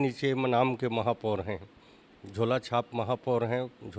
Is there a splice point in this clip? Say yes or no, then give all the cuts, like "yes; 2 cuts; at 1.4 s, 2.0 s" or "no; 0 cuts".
no; 0 cuts